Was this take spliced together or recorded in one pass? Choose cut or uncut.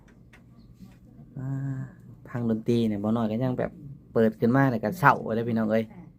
uncut